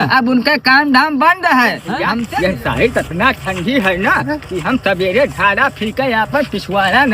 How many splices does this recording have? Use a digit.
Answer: 1